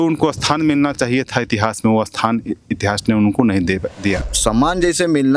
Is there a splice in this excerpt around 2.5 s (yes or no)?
no